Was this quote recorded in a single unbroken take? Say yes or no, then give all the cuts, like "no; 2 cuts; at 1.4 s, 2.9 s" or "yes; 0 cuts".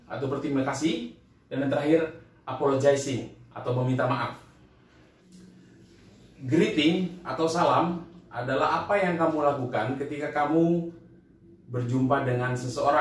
no; 1 cut; at 5.2 s